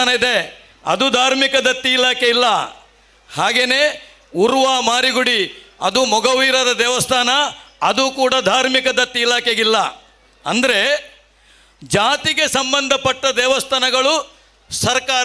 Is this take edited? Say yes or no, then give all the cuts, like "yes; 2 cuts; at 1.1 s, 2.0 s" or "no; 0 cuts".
no; 0 cuts